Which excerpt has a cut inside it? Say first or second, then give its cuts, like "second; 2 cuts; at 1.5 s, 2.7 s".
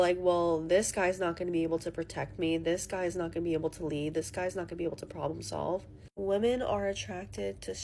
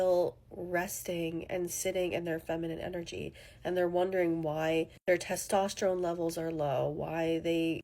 second; 1 cut; at 5.3 s